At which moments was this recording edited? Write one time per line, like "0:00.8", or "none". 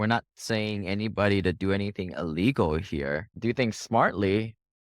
0:03.3